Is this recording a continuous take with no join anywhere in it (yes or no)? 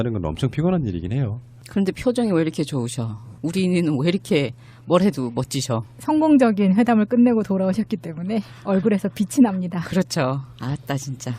no